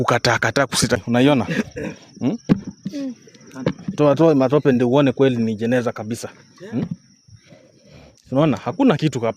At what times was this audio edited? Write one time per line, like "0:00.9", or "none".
0:01.0